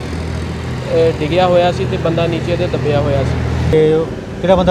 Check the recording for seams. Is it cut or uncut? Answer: cut